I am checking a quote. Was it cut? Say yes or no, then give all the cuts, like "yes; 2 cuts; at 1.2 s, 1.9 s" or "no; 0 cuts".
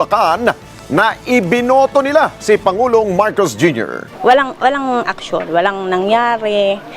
yes; 1 cut; at 4.1 s